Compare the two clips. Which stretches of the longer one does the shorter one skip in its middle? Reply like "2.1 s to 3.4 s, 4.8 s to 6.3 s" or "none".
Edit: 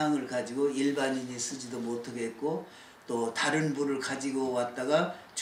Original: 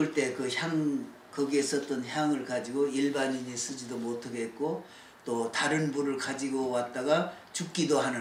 none